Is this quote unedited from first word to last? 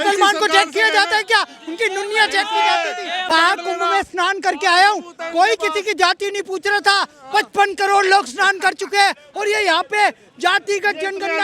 no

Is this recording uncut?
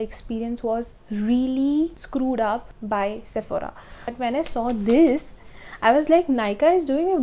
no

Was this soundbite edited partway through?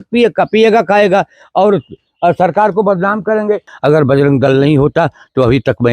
yes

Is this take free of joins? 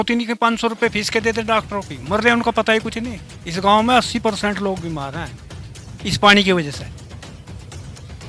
yes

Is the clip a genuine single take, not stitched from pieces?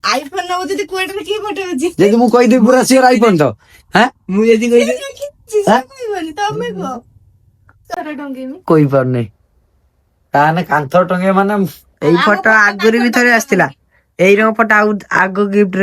no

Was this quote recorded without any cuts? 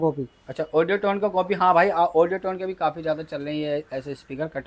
yes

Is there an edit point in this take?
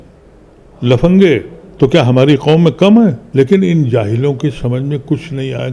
yes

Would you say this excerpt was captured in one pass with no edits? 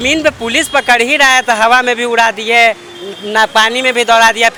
yes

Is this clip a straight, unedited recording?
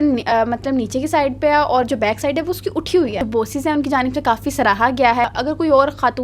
no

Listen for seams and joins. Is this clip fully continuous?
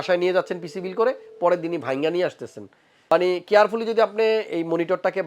no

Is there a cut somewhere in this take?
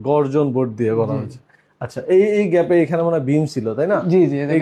no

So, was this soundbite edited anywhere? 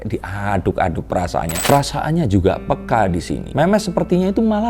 yes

